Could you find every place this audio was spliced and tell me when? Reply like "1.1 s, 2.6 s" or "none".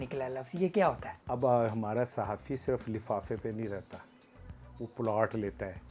1.1 s